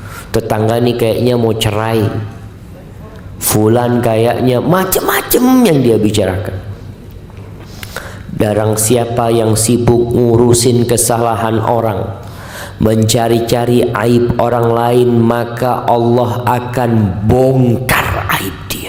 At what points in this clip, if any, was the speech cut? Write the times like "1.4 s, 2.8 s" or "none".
none